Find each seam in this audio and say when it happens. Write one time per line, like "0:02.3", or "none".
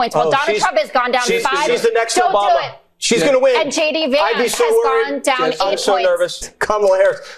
0:02.8
0:06.4